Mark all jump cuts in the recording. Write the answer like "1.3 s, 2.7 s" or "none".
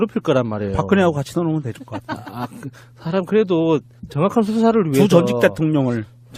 none